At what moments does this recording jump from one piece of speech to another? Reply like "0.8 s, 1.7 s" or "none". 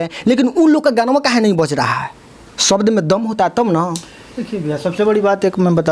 none